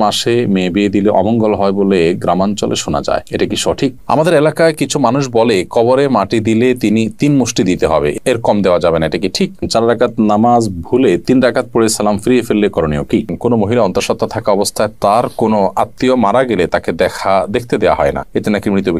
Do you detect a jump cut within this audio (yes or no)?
yes